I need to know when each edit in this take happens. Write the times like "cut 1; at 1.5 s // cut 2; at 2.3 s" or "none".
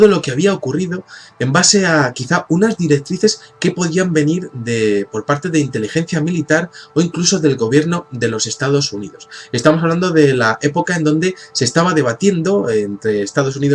cut 1; at 8.1 s